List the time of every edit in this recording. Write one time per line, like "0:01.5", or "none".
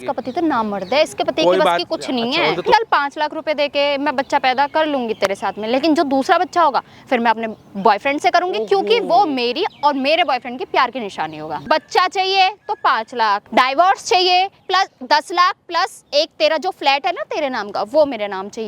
0:02.7
0:11.5
0:13.4
0:14.6

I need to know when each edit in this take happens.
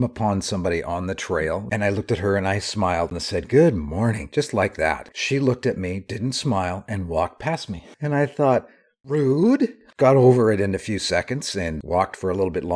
0:01.7
0:03.1
0:05.2
0:07.9

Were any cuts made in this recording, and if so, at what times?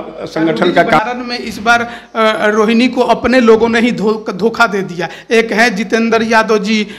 0:01.0

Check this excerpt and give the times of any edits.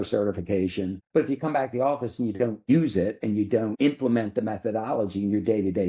0:01.0
0:02.6
0:03.7

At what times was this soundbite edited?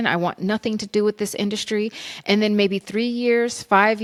none

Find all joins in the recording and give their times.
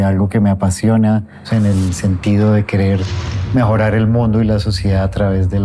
0:01.4

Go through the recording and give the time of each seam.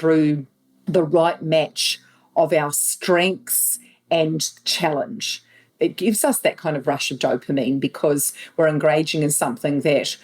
0:05.6

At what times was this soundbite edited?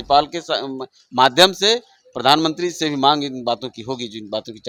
none

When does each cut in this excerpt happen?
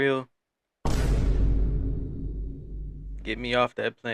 none

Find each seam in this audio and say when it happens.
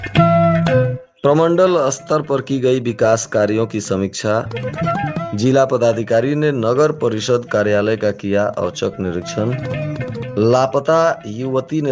0:01.0

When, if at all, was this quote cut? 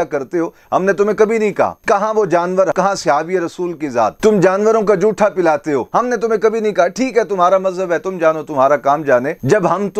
0:02.7
0:04.2
0:05.9

